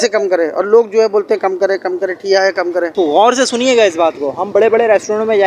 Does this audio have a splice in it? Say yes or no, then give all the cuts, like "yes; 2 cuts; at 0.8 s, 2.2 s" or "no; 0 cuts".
yes; 1 cut; at 2.9 s